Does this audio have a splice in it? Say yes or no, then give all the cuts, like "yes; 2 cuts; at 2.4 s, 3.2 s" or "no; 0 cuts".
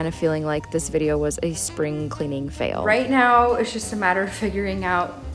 yes; 1 cut; at 2.8 s